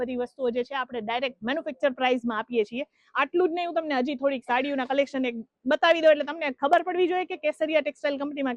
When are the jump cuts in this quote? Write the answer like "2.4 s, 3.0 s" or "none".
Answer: none

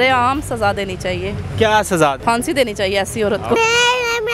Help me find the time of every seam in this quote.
2.2 s, 3.6 s

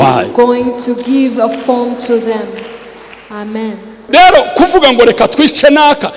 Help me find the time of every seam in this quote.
4.0 s

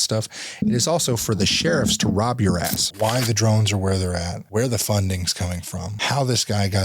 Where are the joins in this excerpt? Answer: 2.8 s, 4.4 s, 5.9 s

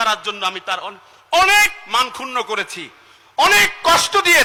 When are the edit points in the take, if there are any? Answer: none

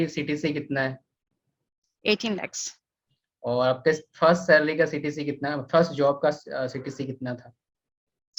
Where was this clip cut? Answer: none

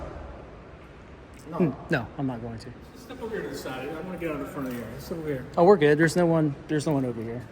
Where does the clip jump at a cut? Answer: 3.0 s

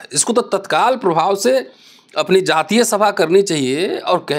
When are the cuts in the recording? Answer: none

